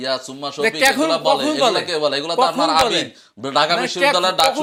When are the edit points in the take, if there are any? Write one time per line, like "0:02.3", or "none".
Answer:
none